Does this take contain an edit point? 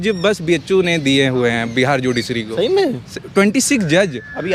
no; 0 cuts

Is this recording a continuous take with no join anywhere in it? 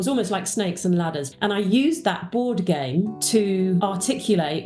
no; 3 cuts; at 1.2 s, 3.2 s, 3.8 s

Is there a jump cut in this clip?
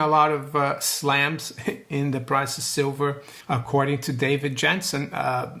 yes; 1 cut; at 3.3 s

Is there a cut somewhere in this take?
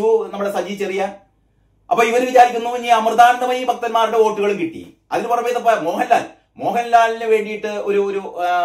no; 0 cuts

